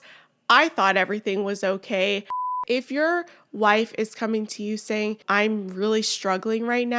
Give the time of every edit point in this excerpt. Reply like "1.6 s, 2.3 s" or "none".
2.6 s, 5.2 s